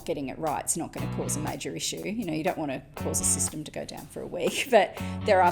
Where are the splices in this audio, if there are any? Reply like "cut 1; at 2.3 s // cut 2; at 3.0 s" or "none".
none